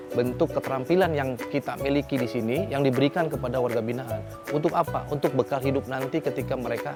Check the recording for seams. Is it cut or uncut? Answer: uncut